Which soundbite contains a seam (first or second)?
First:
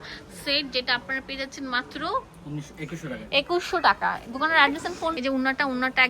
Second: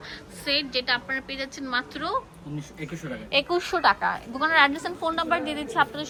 first